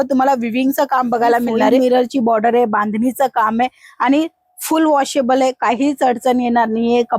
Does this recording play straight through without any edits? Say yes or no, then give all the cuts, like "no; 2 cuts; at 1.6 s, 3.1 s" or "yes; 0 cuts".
no; 1 cut; at 1.8 s